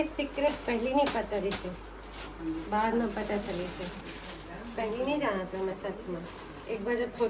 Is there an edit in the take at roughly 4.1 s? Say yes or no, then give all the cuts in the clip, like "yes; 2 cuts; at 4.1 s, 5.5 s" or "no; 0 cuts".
yes; 1 cut; at 4.1 s